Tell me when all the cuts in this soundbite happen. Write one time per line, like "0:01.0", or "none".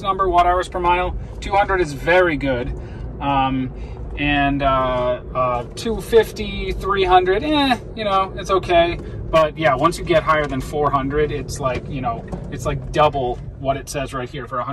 none